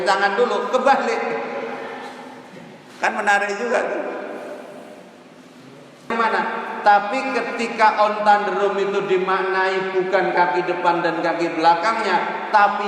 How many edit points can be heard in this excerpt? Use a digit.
1